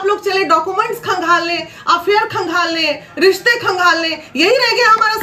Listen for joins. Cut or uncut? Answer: uncut